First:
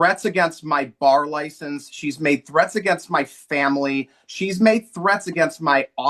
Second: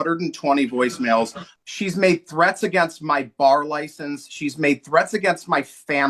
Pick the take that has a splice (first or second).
second